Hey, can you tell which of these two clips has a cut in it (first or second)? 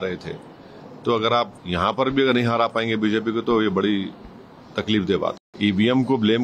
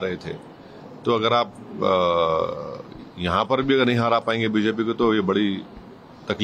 first